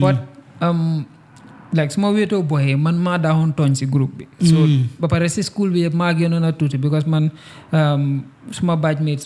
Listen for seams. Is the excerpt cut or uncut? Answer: uncut